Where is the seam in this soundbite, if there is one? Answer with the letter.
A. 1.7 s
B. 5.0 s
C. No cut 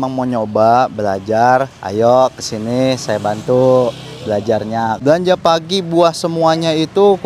B